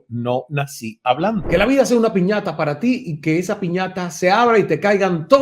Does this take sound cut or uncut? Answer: cut